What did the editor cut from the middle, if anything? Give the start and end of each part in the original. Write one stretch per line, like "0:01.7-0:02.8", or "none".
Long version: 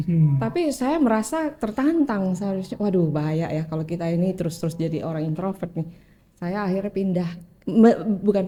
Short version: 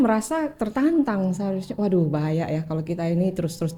none